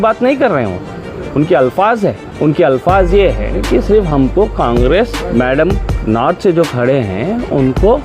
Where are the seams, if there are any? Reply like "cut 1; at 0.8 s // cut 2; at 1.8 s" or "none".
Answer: cut 1; at 2.3 s // cut 2; at 5.2 s